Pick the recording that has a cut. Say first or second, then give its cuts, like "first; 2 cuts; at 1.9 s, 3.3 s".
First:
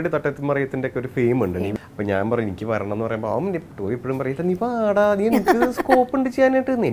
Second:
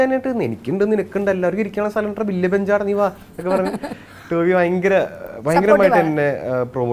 first; 1 cut; at 1.7 s